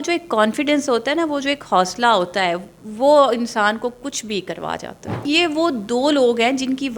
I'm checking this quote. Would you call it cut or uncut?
cut